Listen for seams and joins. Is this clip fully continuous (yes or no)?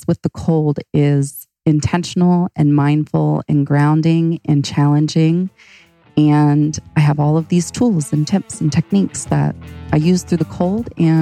yes